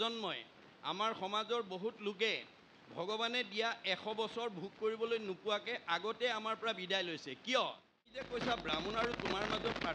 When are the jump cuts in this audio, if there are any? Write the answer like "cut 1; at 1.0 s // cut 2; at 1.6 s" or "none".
cut 1; at 8.2 s